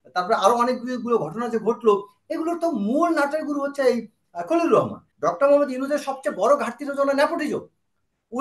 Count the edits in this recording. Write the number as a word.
one